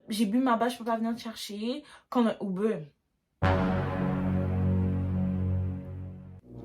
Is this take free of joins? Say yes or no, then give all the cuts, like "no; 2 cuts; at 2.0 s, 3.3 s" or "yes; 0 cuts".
yes; 0 cuts